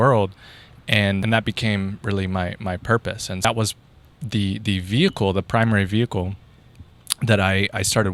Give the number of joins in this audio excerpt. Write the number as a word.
two